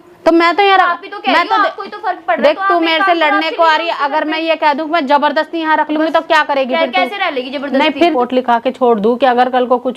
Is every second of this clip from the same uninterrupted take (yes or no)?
no